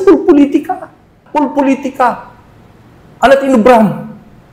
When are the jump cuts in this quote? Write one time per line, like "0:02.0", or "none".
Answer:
0:01.2